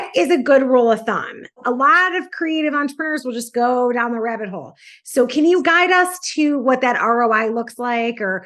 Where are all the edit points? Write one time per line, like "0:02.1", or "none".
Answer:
0:01.6